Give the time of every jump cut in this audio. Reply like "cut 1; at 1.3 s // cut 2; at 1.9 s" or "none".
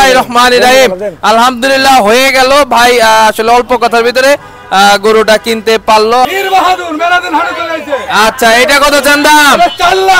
cut 1; at 6.3 s

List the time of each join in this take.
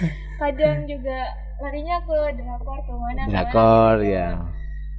none

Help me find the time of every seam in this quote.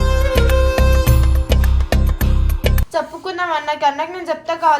cut 1; at 2.8 s

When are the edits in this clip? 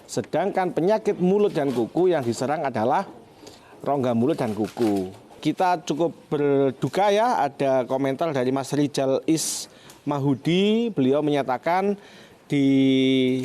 cut 1; at 5.4 s

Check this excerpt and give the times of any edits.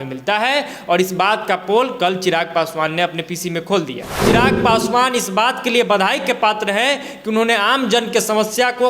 cut 1; at 4.2 s

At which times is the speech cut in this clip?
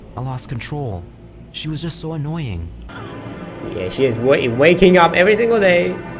cut 1; at 2.9 s

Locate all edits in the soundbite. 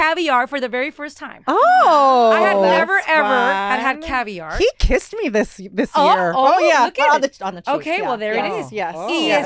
none

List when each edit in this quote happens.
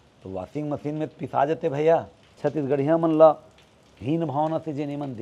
cut 1; at 2.2 s

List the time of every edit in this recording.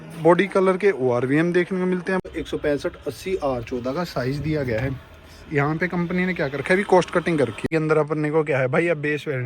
cut 1; at 2.2 s // cut 2; at 7.7 s

